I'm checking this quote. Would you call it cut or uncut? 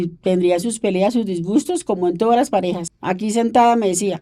cut